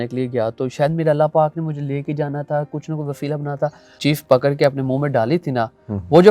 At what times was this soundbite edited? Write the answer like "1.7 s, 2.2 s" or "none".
3.9 s

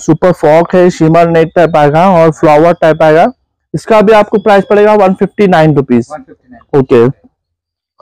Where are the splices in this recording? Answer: none

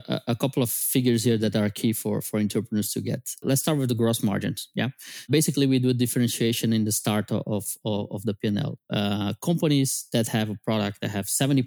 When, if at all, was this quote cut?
0.8 s, 3.4 s, 5.3 s

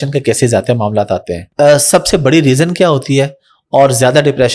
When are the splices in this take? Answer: 1.4 s

